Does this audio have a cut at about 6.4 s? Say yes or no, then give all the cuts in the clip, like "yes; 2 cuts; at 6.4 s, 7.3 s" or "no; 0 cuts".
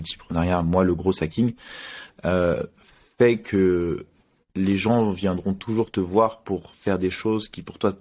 no; 0 cuts